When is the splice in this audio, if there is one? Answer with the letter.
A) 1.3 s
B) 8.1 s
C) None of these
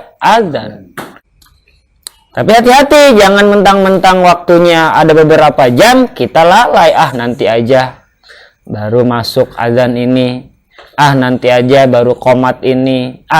A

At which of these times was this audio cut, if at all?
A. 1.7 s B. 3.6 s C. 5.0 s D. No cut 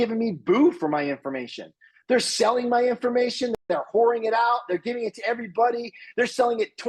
B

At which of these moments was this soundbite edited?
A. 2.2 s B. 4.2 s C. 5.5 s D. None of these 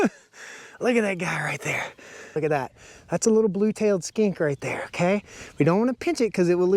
A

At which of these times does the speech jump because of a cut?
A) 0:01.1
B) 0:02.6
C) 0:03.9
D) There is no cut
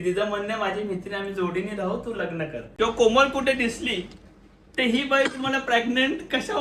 B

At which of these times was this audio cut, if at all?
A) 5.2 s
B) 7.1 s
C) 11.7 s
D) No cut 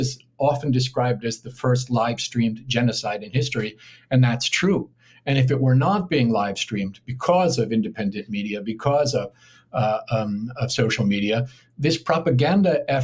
D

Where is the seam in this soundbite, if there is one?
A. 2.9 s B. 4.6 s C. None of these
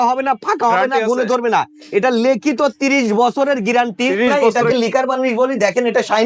B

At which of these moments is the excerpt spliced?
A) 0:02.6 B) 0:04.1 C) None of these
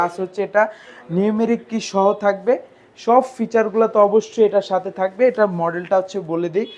C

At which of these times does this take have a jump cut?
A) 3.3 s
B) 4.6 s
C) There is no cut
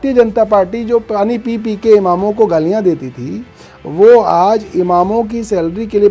C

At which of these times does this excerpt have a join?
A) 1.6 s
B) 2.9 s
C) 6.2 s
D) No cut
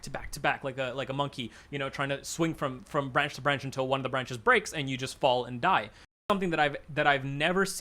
C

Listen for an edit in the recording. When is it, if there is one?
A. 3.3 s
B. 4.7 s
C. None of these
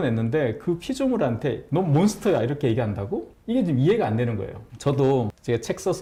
C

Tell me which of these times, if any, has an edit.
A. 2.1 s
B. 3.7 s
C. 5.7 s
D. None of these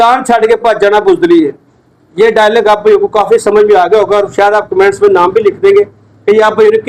D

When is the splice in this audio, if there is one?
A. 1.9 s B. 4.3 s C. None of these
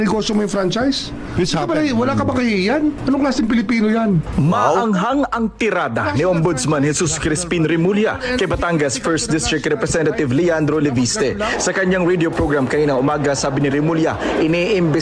C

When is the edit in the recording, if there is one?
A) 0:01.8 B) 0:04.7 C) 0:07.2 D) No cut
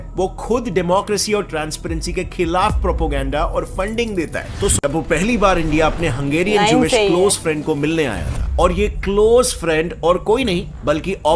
B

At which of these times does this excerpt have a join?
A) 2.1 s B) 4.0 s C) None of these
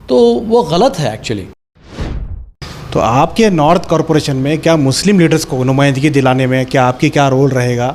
A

